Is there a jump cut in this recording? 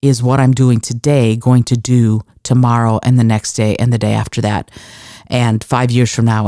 no; 0 cuts

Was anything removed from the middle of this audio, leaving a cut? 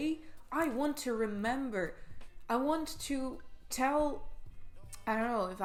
no; 0 cuts

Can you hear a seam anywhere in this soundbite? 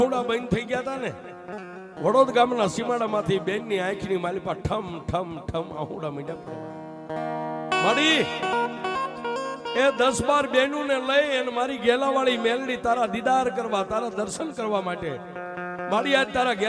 no; 0 cuts

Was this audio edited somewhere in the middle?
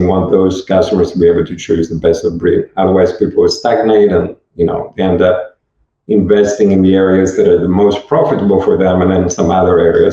no; 0 cuts

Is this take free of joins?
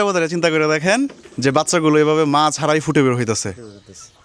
no; 1 cut; at 1.2 s

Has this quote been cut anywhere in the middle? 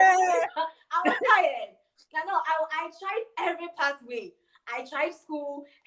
no; 0 cuts

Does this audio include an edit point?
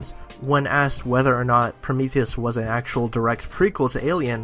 no; 0 cuts

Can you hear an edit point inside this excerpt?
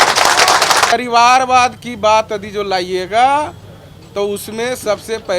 yes; 1 cut; at 0.9 s

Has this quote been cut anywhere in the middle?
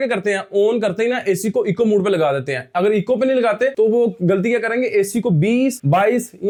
no; 0 cuts

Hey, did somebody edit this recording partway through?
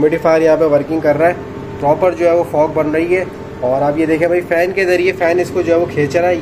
no; 0 cuts

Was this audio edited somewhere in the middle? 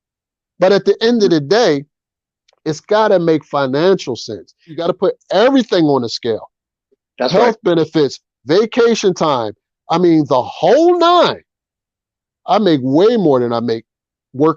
yes; 1 cut; at 4.8 s

